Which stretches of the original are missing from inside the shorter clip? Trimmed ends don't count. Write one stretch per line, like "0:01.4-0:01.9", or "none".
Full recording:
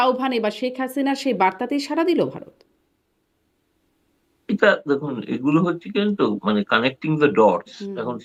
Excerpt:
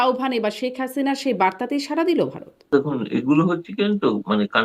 0:02.7-0:04.8